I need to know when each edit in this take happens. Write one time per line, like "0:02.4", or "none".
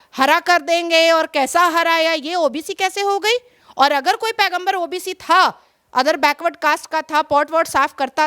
none

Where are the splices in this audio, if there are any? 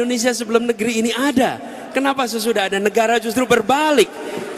none

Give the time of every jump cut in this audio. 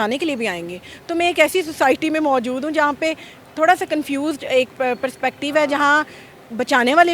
none

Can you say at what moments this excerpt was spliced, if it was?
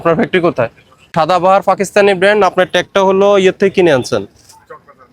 0:01.1

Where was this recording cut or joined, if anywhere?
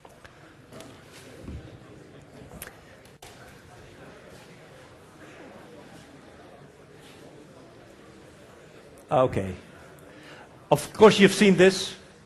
0:11.3

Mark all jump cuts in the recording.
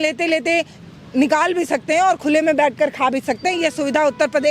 none

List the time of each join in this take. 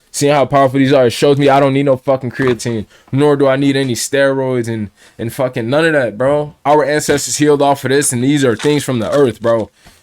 0:06.5

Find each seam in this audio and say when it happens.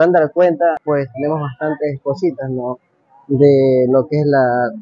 none

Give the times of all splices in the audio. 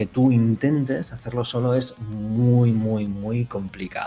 none

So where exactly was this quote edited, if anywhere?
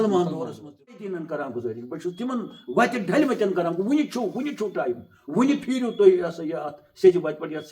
0:01.1

